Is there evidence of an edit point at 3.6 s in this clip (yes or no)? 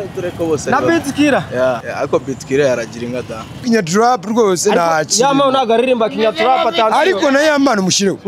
yes